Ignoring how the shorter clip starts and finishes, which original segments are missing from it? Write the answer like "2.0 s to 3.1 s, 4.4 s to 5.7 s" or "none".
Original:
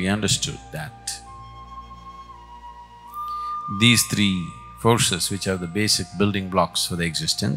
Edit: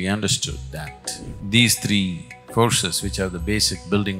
1.3 s to 3.6 s